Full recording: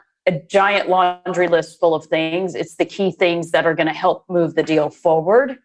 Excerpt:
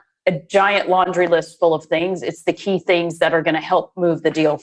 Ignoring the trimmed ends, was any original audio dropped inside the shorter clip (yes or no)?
yes